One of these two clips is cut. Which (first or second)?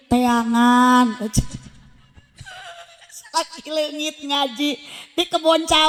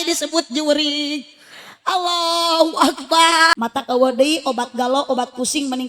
second